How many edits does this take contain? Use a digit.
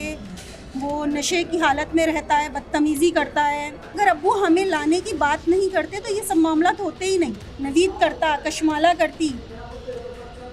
2